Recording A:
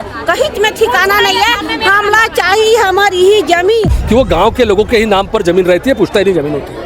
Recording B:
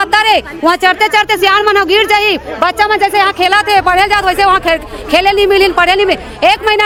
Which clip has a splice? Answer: A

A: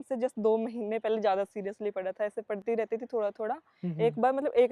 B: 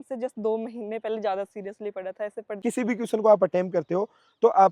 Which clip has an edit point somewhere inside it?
B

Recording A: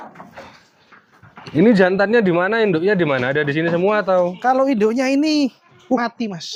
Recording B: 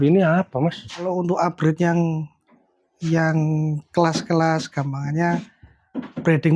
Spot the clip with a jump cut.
B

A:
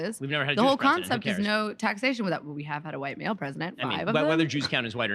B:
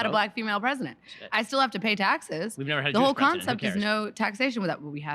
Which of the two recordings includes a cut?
A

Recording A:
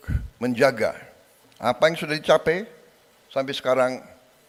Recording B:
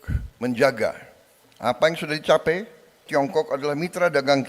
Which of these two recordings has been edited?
B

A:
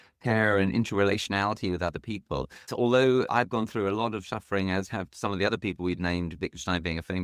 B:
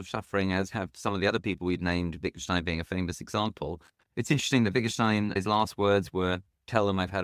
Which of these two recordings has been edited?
A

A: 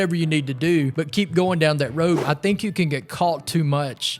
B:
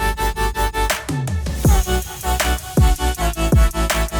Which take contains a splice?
A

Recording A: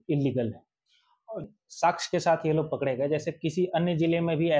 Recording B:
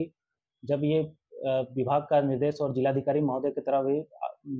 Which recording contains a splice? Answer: A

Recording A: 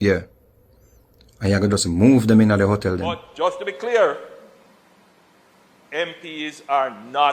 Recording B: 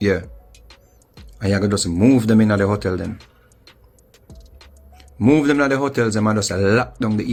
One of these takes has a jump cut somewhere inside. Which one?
A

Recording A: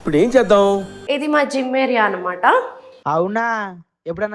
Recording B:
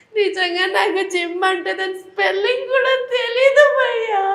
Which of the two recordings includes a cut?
A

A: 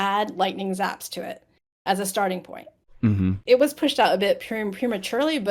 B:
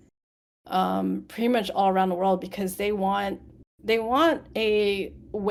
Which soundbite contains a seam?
A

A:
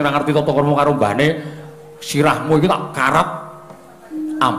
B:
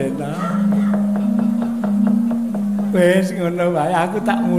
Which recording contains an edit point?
B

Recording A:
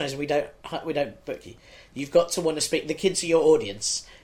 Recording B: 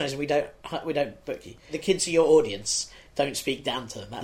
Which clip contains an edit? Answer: B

